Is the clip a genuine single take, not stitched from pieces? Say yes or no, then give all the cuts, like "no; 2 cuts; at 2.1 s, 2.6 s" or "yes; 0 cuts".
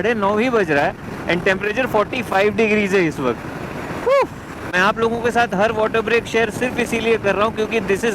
yes; 0 cuts